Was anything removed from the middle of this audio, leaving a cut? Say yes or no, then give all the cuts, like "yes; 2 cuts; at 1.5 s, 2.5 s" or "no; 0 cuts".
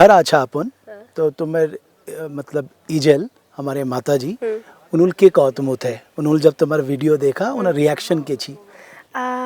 no; 0 cuts